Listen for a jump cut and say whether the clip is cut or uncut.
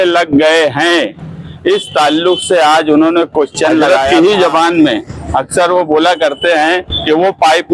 cut